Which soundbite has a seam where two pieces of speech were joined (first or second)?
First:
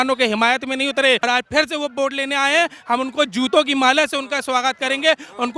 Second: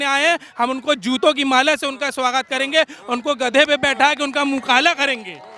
first